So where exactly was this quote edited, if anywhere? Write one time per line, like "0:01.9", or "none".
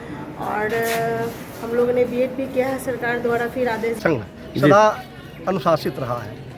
0:04.0